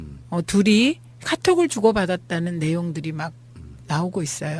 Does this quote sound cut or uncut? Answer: cut